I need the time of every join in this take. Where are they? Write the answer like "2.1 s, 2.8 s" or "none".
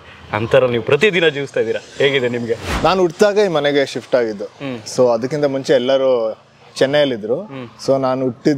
2.7 s